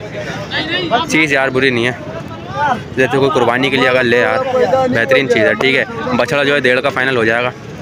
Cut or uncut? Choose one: uncut